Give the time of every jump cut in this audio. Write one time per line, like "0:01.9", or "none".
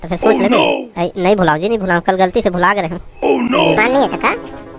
0:03.8